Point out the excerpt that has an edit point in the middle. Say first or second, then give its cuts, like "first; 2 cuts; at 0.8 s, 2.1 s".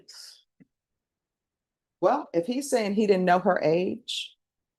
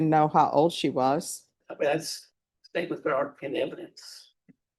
second; 1 cut; at 1.6 s